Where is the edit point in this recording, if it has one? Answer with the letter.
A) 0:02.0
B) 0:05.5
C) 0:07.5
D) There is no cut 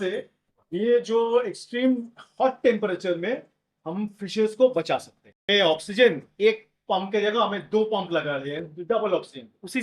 B